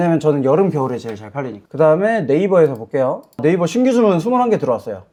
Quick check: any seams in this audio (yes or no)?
no